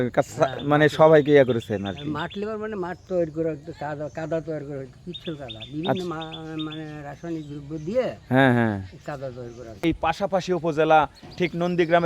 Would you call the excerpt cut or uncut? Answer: cut